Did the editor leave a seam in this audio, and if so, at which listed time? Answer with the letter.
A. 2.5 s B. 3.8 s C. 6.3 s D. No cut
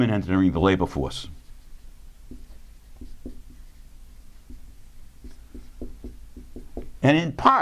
C